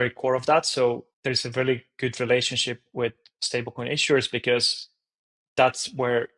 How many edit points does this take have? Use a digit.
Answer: 1